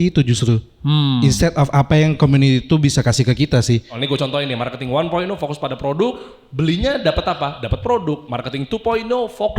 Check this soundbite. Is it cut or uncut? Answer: cut